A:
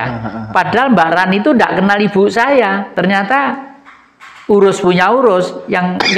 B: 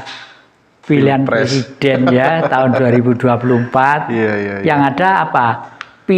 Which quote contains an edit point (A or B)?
A